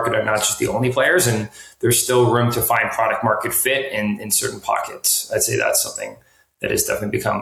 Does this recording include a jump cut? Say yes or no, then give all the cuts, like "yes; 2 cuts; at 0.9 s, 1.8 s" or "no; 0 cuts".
no; 0 cuts